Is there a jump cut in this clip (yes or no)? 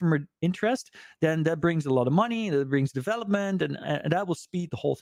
no